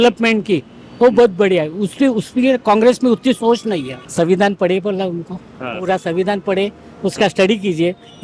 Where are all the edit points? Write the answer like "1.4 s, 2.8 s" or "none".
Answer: 4.0 s